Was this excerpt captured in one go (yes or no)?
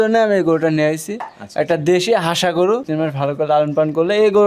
no